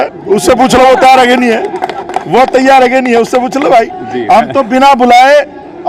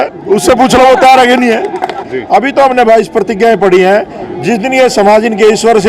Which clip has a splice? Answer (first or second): second